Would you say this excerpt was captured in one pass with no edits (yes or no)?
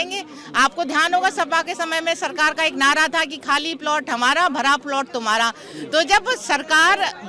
yes